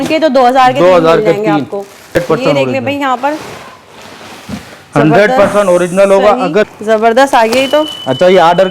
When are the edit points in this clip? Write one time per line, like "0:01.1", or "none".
0:02.2
0:06.8